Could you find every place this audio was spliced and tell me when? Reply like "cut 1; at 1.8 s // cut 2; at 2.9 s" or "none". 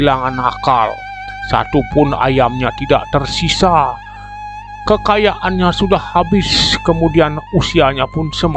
none

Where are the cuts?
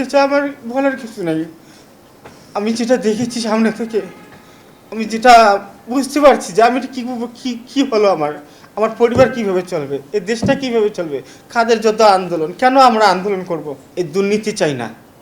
cut 1; at 13.8 s

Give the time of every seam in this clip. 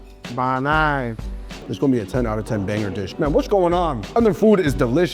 cut 1; at 1.7 s // cut 2; at 3.1 s

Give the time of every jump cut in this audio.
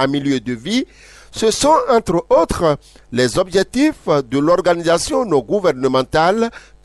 none

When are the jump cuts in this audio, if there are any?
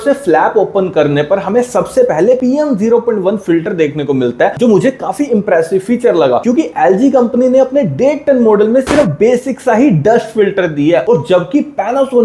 none

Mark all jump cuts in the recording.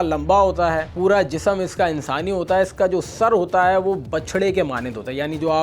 none

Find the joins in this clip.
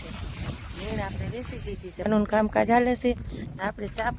cut 1; at 2.1 s

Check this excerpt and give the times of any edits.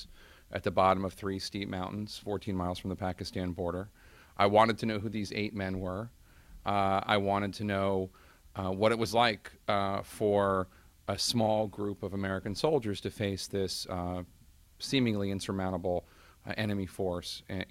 cut 1; at 10.8 s

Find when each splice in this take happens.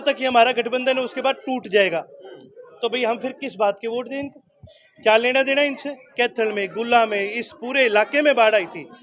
cut 1; at 6.0 s

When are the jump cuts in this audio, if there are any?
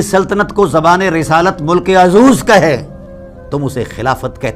none

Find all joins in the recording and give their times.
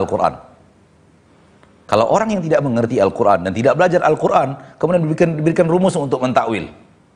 none

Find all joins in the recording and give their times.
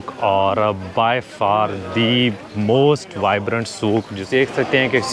cut 1; at 4.2 s

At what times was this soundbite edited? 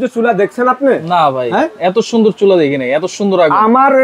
none

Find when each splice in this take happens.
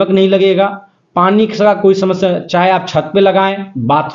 none

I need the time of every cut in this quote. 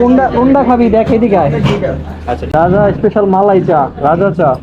cut 1; at 2.4 s

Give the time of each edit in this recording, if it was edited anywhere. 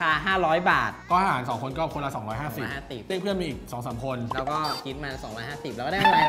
cut 1; at 1.0 s

